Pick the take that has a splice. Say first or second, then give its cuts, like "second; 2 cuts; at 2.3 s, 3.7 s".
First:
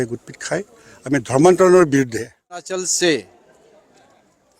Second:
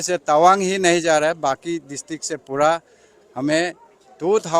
first; 1 cut; at 2.7 s